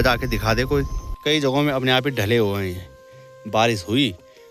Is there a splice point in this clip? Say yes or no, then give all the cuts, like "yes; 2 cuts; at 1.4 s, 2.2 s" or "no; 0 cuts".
yes; 1 cut; at 1.0 s